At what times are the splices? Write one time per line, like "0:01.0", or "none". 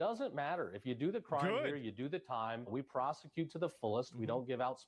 0:02.7